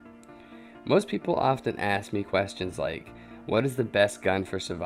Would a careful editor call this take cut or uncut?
uncut